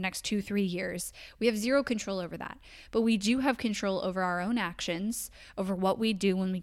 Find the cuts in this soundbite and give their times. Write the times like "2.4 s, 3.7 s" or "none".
none